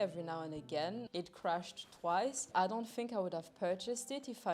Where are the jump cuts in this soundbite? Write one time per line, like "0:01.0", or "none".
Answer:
0:01.0
0:02.4